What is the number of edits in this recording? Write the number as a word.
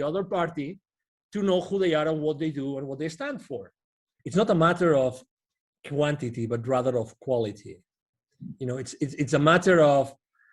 one